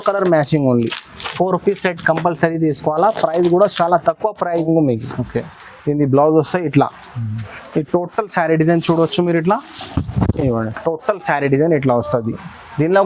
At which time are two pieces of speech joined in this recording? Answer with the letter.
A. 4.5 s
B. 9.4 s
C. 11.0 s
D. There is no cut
A